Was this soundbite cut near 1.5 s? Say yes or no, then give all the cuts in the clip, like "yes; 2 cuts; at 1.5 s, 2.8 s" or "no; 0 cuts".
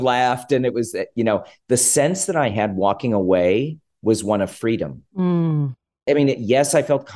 no; 2 cuts; at 3.8 s, 6.0 s